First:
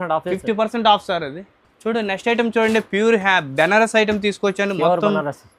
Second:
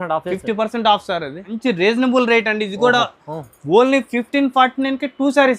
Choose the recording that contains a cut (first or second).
second